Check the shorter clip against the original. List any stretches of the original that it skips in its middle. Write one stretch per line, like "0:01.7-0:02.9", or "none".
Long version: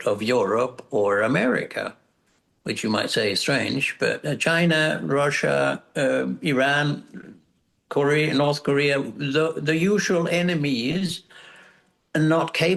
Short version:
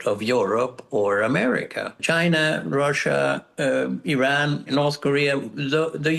0:02.0-0:04.4
0:07.0-0:08.3